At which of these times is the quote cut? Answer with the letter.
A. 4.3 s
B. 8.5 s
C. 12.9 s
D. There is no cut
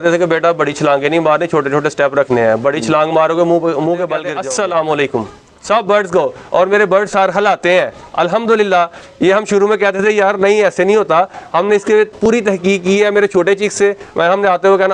A